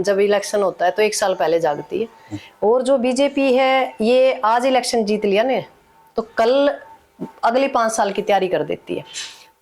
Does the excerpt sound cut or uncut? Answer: uncut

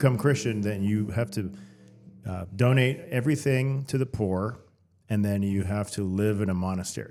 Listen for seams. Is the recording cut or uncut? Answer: uncut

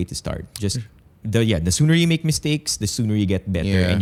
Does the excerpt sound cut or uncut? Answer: uncut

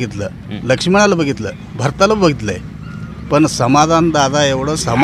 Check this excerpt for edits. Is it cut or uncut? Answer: uncut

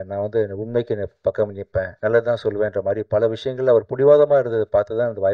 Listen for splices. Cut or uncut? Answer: cut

